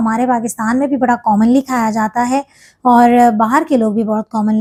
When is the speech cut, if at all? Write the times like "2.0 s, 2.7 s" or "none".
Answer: none